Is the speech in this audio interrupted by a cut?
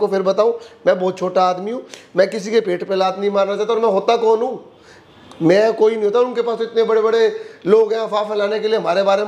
no; 0 cuts

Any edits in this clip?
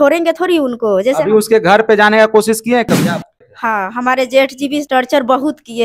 yes; 2 cuts; at 3.3 s, 4.9 s

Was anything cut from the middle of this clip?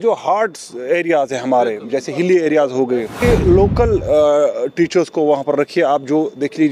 yes; 1 cut; at 3.2 s

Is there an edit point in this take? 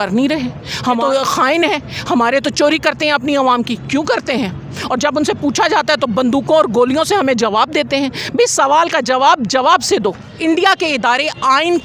yes; 2 cuts; at 1.0 s, 10.3 s

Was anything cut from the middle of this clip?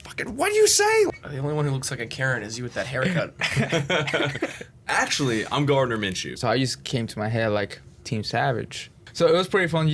yes; 3 cuts; at 1.1 s, 6.3 s, 9.0 s

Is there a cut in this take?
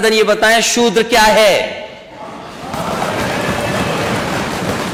no; 0 cuts

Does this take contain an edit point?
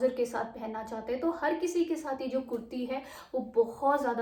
no; 0 cuts

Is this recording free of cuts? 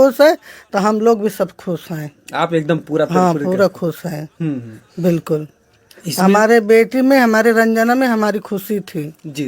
yes; 0 cuts

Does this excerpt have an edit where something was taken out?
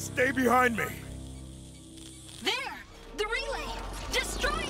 yes; 2 cuts; at 0.9 s, 2.3 s

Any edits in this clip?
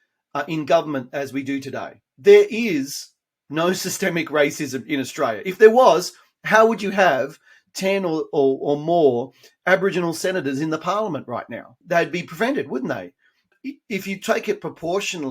yes; 3 cuts; at 2.0 s, 11.8 s, 13.6 s

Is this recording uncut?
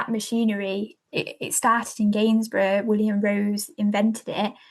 no; 1 cut; at 1.0 s

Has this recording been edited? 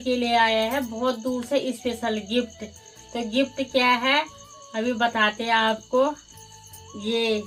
no; 0 cuts

